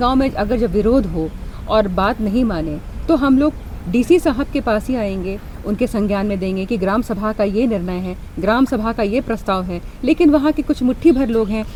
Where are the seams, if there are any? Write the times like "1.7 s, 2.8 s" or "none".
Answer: none